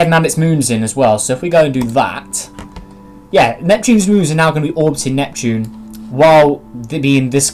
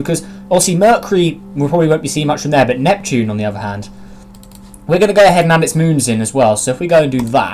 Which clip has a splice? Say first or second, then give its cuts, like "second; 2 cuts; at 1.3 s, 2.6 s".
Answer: second; 1 cut; at 3.6 s